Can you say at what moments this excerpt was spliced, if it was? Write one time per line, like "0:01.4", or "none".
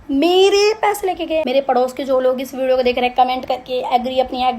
0:01.4